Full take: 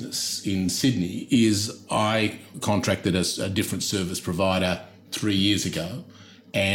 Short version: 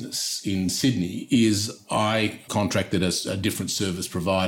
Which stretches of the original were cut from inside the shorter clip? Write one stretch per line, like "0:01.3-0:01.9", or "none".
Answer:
0:02.4-0:02.5